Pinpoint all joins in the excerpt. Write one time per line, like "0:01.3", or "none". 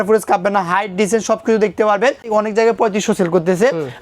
0:02.3